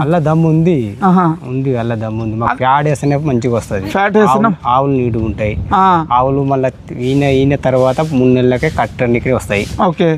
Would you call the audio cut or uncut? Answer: uncut